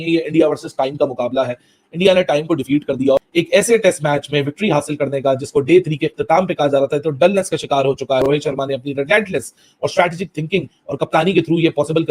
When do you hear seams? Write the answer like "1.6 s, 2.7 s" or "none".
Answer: 8.2 s